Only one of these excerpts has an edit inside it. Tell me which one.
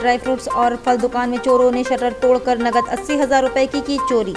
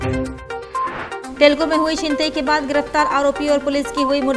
second; 1 cut; at 1.2 s

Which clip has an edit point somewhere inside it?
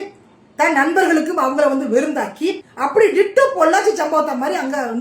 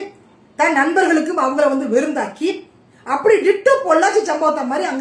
first; 1 cut; at 2.7 s

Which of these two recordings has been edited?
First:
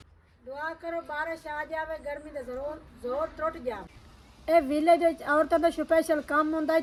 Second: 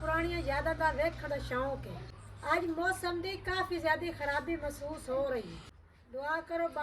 second; 1 cut; at 1.9 s

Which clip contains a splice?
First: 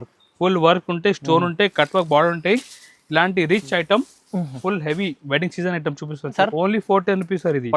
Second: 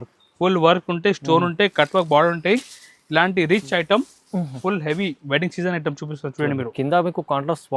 first; 1 cut; at 6.4 s

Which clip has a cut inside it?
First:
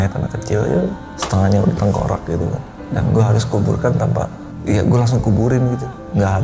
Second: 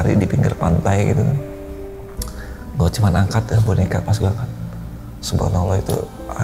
first; 2 cuts; at 1.1 s, 4.4 s

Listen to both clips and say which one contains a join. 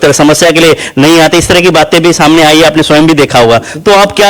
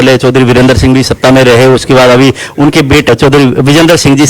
second; 1 cut; at 3.1 s

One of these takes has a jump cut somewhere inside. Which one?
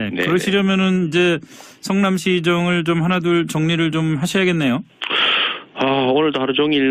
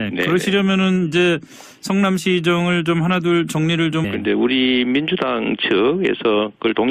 first; 1 cut; at 4.1 s

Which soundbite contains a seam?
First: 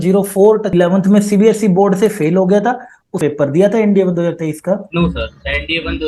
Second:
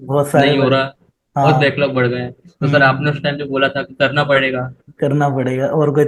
first; 2 cuts; at 0.7 s, 3.1 s

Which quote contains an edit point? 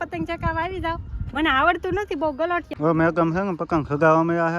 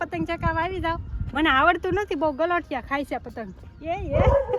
first; 1 cut; at 2.7 s

